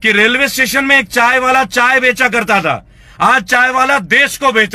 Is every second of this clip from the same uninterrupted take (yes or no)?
yes